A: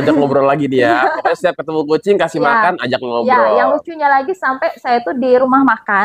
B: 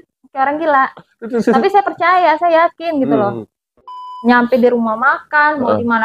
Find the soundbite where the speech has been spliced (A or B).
B